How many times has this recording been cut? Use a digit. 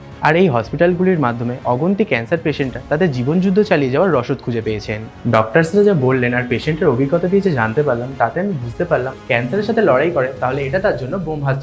2